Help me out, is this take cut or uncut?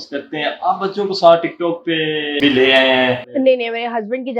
cut